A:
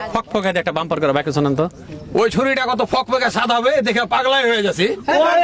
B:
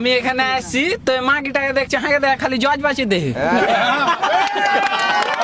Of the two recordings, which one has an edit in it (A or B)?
A